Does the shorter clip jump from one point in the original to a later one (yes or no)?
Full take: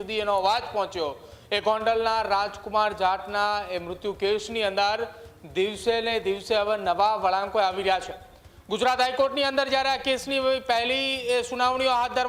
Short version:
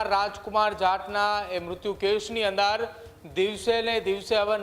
no